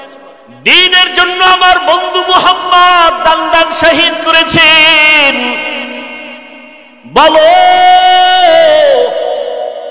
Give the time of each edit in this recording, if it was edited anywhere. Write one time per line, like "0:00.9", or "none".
none